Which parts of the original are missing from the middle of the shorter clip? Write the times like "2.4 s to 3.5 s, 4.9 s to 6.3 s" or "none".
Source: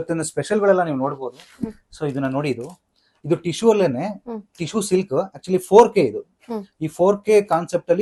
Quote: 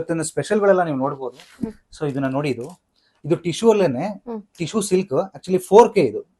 none